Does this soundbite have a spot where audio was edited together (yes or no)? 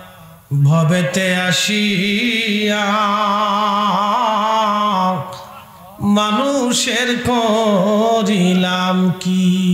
no